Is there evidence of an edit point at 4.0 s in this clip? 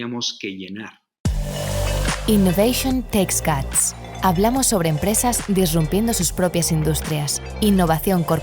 no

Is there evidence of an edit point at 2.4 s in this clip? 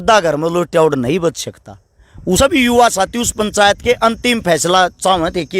yes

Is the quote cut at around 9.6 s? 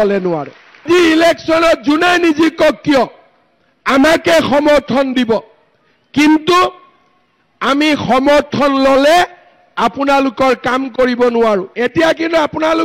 no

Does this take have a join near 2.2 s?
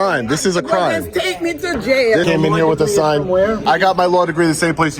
yes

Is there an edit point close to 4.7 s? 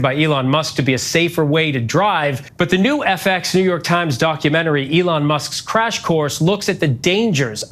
no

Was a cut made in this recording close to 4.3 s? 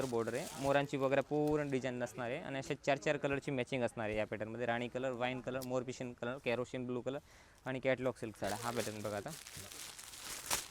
no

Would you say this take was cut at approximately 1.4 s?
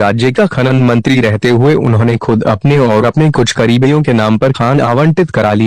yes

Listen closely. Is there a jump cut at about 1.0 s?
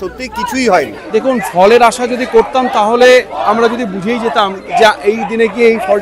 yes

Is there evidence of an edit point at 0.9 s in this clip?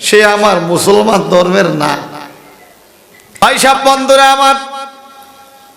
no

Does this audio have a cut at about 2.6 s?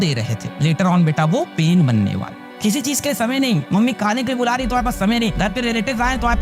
yes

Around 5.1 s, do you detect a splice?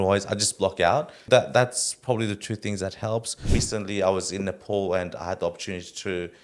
no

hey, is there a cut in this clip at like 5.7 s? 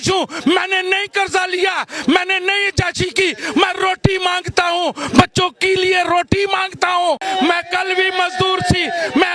no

